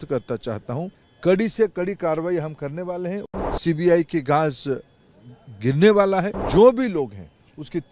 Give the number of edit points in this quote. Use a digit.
3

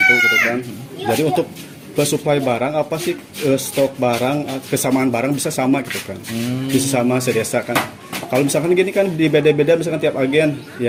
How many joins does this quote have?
0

